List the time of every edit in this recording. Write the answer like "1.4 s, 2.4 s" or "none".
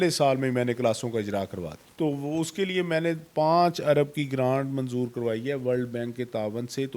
1.8 s